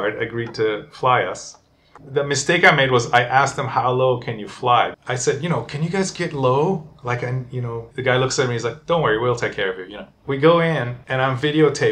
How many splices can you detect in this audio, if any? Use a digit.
5